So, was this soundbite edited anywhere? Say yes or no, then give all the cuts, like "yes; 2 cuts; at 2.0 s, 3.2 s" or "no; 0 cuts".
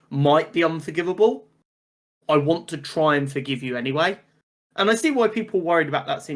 no; 0 cuts